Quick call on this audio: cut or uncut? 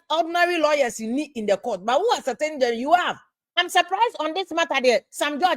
cut